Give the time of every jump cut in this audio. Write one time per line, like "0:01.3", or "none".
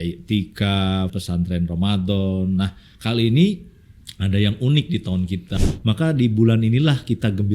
0:01.2
0:05.5